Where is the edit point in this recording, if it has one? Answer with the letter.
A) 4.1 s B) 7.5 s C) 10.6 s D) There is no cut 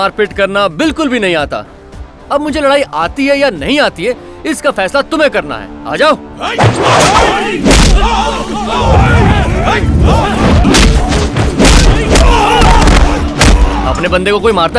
C